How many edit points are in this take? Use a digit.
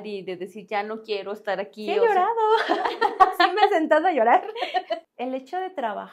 1